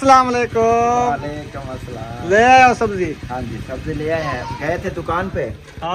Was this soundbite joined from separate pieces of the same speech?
no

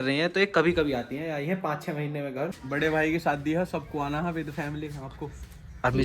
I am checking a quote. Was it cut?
yes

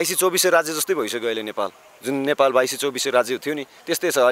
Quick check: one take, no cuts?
no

